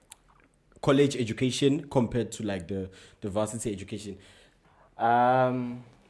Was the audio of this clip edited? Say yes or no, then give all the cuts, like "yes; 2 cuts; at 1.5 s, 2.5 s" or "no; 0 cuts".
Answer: yes; 1 cut; at 4.6 s